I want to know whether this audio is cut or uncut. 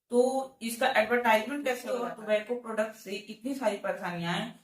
cut